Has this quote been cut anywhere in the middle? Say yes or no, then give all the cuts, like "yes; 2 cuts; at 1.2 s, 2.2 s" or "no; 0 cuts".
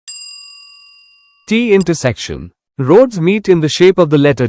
yes; 1 cut; at 1.4 s